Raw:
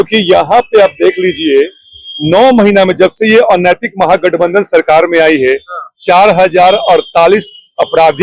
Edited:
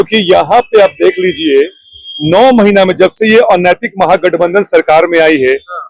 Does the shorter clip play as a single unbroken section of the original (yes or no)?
yes